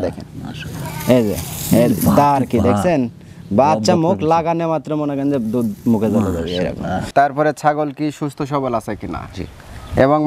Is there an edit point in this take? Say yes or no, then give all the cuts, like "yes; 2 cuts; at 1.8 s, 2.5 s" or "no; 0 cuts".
yes; 1 cut; at 7.0 s